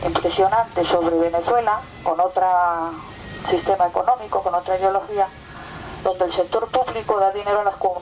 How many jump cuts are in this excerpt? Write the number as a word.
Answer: zero